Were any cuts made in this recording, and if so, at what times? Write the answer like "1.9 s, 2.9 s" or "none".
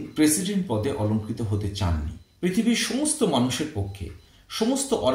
2.2 s